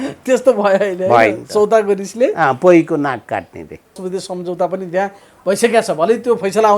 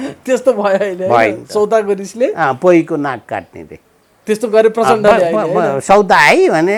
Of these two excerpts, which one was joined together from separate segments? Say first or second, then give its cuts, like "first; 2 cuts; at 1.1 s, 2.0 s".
first; 1 cut; at 4.0 s